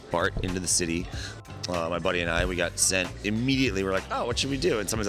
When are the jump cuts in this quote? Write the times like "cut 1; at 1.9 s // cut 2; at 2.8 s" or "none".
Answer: cut 1; at 1.3 s